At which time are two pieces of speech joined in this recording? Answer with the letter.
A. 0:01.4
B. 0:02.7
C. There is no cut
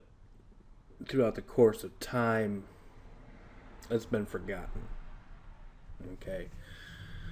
A